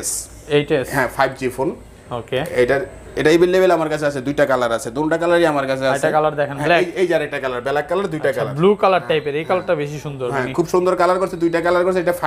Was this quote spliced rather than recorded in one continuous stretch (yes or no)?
no